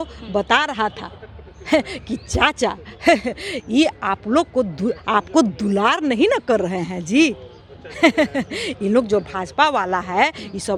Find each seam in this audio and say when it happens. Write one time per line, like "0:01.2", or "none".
none